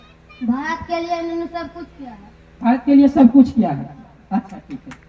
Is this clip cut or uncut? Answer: uncut